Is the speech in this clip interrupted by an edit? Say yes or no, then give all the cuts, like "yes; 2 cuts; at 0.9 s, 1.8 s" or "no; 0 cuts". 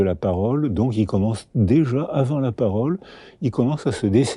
no; 0 cuts